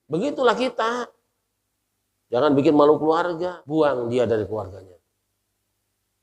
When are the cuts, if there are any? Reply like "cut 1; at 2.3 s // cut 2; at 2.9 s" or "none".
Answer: cut 1; at 3.5 s